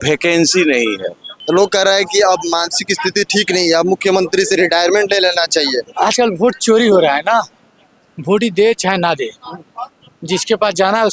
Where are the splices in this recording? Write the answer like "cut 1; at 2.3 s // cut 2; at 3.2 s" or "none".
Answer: cut 1; at 1.3 s // cut 2; at 5.8 s